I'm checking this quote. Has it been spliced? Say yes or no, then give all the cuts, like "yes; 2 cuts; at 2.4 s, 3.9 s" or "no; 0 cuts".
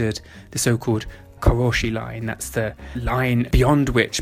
yes; 2 cuts; at 1.2 s, 3.3 s